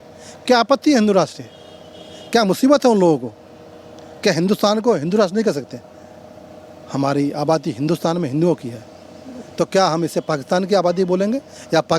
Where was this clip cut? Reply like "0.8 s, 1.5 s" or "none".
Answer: none